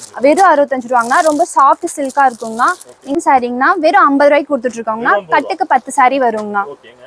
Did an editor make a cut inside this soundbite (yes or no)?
yes